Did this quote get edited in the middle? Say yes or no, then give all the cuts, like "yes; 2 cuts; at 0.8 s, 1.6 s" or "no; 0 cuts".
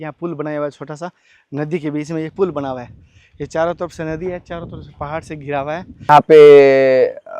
yes; 1 cut; at 6.1 s